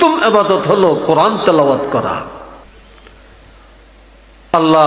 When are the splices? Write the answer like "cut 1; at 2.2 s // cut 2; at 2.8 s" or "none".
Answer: cut 1; at 2.6 s